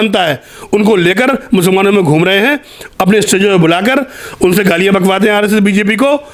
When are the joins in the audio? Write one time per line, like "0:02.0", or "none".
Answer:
none